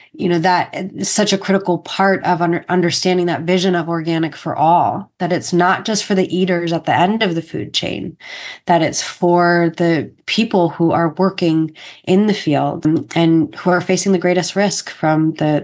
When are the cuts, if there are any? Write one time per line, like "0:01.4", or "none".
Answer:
0:10.2
0:12.8